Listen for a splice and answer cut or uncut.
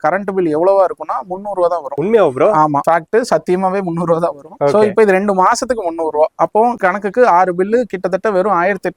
uncut